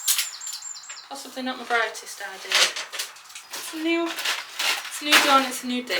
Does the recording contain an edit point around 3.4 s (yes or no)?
yes